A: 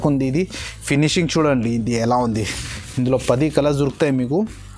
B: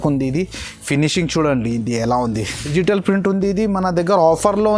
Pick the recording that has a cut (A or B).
B